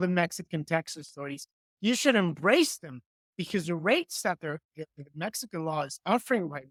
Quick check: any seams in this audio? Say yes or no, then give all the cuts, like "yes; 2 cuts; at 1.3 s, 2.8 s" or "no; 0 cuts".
no; 0 cuts